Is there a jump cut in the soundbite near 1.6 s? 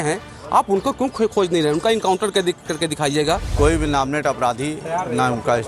no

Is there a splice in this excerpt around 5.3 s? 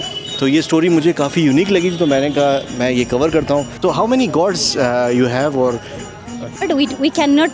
no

